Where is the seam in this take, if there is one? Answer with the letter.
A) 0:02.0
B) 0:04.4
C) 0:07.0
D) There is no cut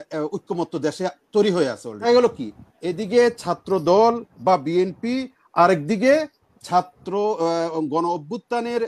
A